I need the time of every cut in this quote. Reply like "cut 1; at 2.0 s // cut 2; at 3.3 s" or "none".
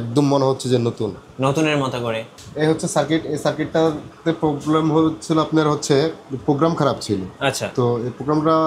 cut 1; at 2.3 s